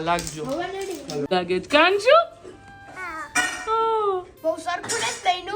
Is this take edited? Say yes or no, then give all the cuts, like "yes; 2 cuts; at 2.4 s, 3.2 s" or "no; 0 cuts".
yes; 1 cut; at 1.3 s